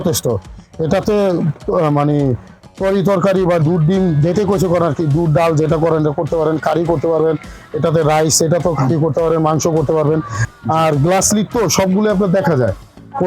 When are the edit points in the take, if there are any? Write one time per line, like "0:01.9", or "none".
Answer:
0:10.4